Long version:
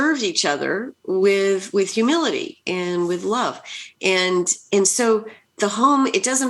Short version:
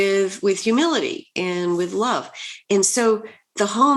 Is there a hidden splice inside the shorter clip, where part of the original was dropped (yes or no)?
yes